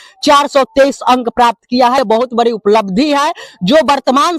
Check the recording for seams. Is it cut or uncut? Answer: cut